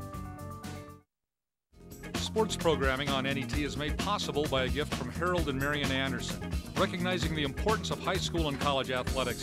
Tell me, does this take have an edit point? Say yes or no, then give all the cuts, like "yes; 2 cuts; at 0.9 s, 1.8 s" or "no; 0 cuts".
yes; 1 cut; at 1.1 s